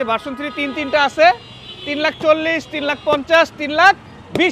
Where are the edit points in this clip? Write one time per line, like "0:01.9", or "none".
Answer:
none